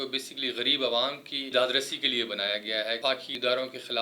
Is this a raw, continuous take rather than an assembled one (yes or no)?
no